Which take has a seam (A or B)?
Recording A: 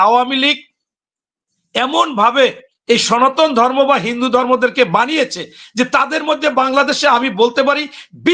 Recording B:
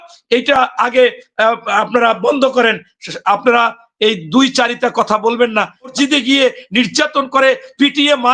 B